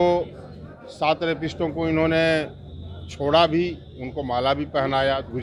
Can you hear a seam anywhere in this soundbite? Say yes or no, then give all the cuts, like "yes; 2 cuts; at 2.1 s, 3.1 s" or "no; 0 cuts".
no; 0 cuts